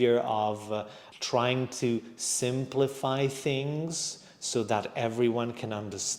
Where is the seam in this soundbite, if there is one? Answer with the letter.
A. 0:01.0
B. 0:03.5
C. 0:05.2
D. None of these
A